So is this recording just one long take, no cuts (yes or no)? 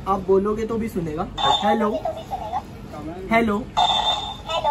yes